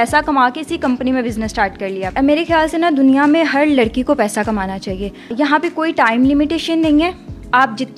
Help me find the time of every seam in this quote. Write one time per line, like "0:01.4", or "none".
0:02.1
0:05.3